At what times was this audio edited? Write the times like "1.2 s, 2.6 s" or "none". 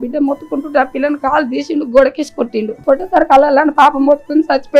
2.7 s

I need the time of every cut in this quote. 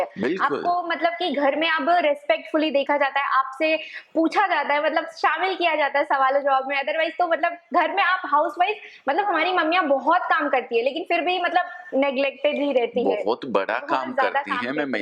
none

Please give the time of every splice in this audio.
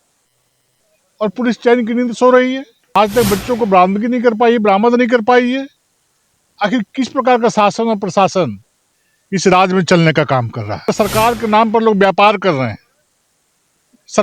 2.7 s, 10.9 s

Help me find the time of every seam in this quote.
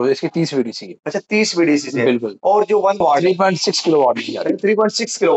3.0 s

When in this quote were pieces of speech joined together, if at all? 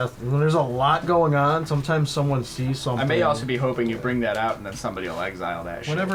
none

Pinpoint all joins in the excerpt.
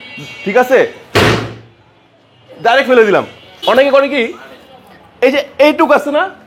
3.4 s

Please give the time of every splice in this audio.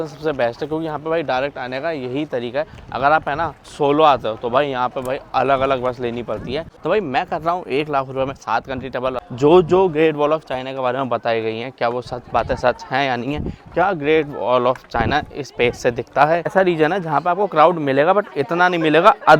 3.6 s, 6.7 s, 9.2 s, 16.5 s

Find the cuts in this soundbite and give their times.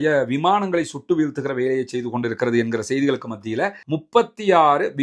3.9 s

